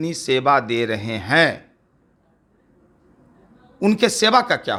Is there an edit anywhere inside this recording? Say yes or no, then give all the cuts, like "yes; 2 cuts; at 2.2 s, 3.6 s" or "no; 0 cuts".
no; 0 cuts